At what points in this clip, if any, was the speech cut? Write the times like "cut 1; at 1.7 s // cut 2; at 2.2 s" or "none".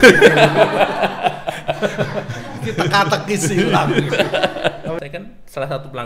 cut 1; at 5.0 s